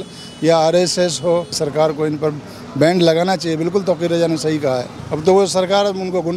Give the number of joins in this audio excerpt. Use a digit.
2